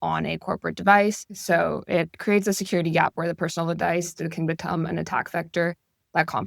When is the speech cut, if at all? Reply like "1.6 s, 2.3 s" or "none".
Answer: 1.3 s